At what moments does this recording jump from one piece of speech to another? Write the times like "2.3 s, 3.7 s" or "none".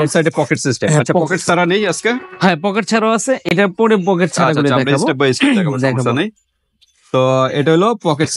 none